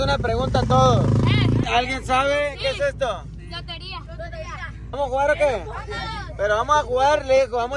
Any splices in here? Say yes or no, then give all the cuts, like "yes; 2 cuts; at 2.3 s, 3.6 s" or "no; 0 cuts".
yes; 2 cuts; at 1.6 s, 5.0 s